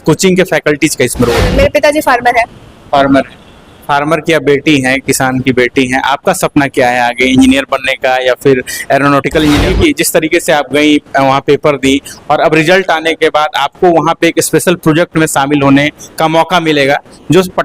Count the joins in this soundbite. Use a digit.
2